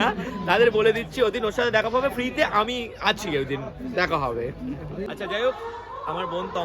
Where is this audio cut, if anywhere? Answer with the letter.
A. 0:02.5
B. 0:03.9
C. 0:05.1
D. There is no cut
C